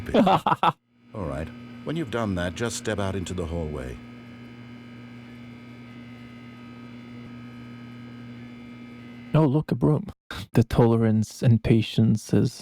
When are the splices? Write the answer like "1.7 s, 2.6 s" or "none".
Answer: 0.8 s, 7.2 s